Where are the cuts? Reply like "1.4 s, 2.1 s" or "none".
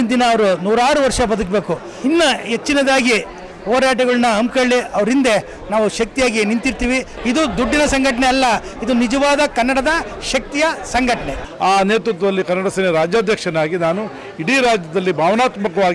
2.0 s, 7.1 s, 11.3 s